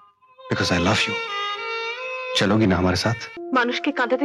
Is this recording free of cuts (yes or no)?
no